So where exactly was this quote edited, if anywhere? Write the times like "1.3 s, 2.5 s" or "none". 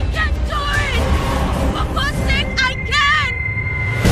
none